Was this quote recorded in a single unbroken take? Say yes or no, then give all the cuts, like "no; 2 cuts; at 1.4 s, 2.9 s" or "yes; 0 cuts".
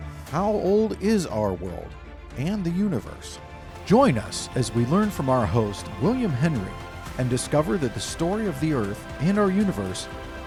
yes; 0 cuts